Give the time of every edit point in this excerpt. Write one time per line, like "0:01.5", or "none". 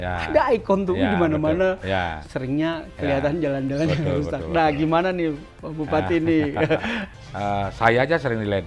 0:07.0

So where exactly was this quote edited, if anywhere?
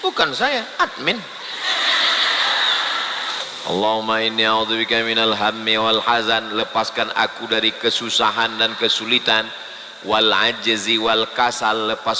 0:03.3

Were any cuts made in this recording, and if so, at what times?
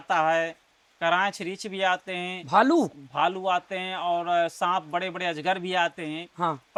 none

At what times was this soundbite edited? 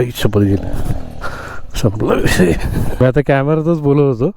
0:03.0

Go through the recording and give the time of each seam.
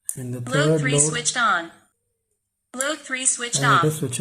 none

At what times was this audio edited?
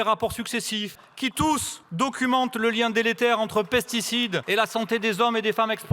0:01.0
0:01.8
0:04.4

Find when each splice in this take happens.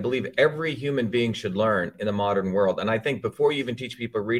none

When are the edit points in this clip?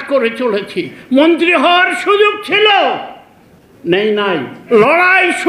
0:04.6

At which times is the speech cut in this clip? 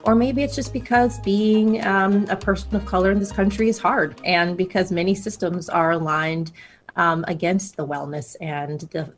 none

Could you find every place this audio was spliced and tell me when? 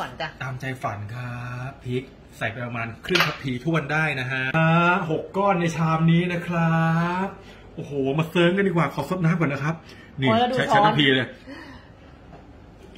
0:04.3

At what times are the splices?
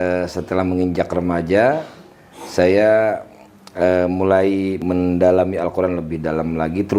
0:04.8

